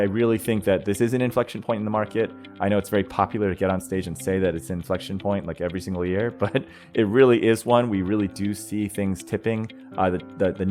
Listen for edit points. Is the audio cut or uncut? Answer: cut